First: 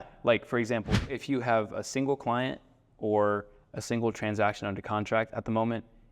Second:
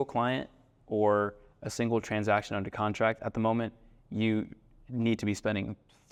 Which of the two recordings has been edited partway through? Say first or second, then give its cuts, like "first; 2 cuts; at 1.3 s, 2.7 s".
first; 1 cut; at 1.1 s